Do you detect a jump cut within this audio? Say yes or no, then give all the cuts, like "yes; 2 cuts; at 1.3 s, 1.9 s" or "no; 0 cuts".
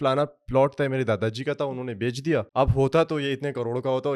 yes; 1 cut; at 2.5 s